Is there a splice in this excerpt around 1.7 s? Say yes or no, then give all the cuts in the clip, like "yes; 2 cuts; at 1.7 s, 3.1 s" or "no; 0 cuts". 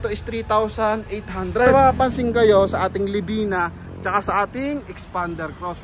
yes; 1 cut; at 1.7 s